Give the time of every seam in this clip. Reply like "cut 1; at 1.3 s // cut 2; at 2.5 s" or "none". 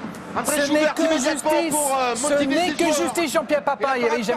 cut 1; at 1.0 s